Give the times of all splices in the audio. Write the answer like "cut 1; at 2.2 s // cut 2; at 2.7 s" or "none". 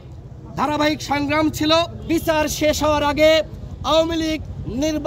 cut 1; at 2.0 s